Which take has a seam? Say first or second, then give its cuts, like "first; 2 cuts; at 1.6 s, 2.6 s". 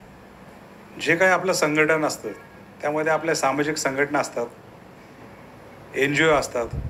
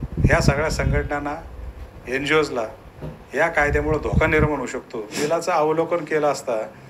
second; 1 cut; at 5.1 s